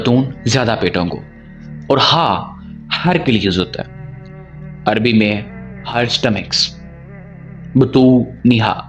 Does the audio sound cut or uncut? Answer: uncut